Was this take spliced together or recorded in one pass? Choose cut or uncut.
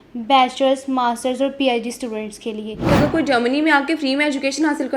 cut